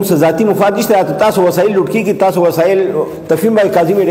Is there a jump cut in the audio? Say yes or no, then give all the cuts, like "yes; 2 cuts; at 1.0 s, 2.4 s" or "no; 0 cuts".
yes; 1 cut; at 3.1 s